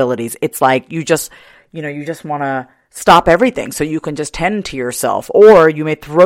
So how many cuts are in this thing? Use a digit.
0